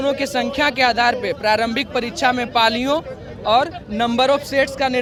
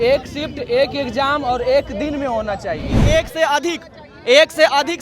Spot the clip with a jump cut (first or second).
second